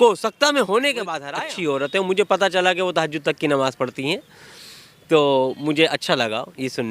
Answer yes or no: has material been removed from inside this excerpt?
yes